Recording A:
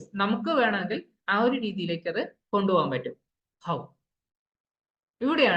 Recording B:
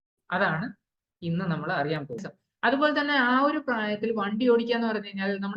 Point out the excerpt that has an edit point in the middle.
B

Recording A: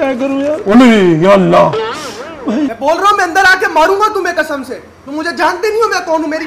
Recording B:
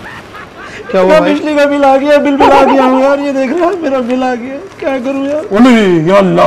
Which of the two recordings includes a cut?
A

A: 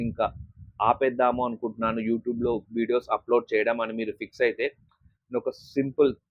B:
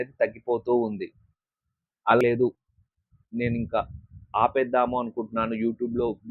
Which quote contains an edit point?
B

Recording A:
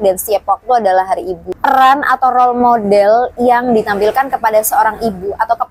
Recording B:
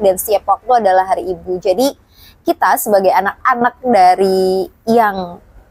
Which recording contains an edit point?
A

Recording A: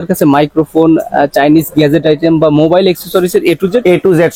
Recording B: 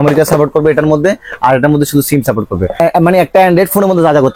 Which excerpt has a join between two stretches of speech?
B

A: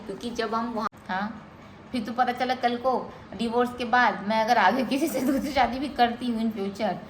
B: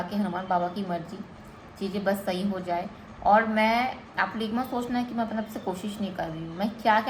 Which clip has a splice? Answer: A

